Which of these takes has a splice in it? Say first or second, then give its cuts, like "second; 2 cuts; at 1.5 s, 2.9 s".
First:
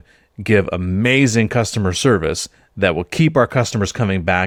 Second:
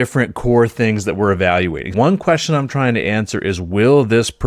second; 1 cut; at 1.9 s